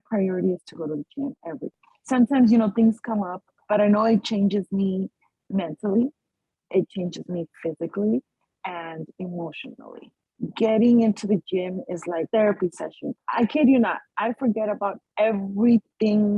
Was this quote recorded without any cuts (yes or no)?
no